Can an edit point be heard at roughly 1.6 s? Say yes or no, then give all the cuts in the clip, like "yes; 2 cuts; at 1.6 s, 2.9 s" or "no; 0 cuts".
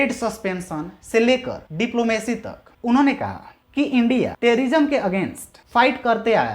yes; 2 cuts; at 1.6 s, 2.6 s